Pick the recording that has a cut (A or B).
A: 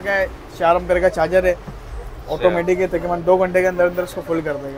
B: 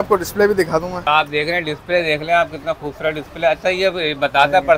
B